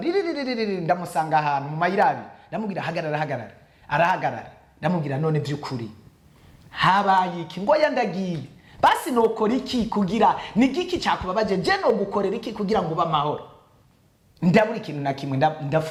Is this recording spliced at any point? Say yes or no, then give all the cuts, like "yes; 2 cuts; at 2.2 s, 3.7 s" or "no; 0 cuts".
no; 0 cuts